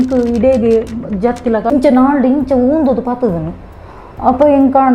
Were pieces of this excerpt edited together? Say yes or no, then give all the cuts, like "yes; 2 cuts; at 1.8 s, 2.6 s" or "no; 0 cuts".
yes; 1 cut; at 1.7 s